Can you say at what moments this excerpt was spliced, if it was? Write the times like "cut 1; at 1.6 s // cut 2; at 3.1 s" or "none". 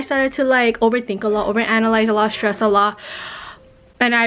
none